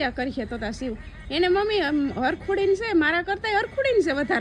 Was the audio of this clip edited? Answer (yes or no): no